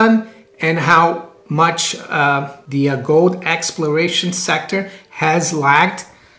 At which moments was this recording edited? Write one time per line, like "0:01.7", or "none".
0:01.3
0:02.6